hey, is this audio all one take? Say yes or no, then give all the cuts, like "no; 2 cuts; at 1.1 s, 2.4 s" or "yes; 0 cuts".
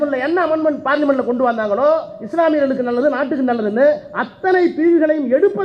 yes; 0 cuts